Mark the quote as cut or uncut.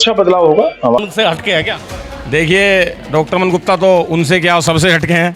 cut